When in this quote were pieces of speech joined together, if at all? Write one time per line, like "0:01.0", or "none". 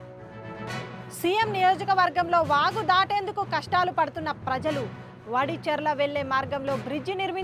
0:01.0